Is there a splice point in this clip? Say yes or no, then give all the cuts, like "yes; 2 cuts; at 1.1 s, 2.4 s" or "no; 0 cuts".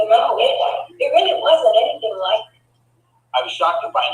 no; 0 cuts